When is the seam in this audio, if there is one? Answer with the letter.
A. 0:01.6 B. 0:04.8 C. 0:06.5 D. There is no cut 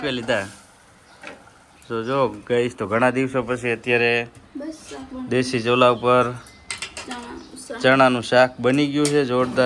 D